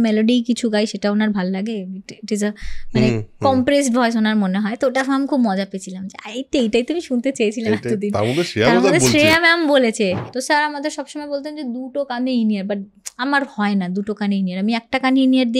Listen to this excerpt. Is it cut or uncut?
cut